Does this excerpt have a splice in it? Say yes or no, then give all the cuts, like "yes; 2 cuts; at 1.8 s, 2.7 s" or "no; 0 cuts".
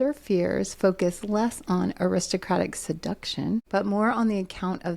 yes; 1 cut; at 3.7 s